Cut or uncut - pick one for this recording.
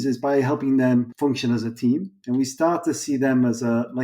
cut